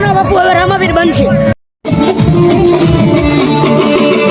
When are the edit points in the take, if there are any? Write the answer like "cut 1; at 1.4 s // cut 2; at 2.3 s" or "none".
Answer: cut 1; at 1.6 s